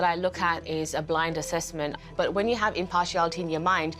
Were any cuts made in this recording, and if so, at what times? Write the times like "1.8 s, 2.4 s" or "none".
2.1 s